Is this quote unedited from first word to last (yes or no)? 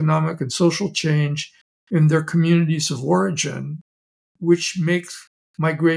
yes